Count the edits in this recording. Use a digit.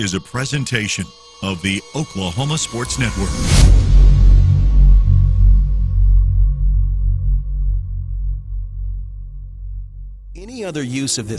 1